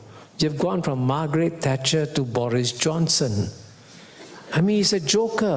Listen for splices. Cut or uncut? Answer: uncut